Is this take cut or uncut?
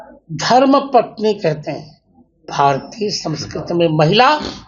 cut